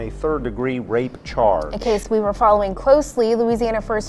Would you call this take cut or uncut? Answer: cut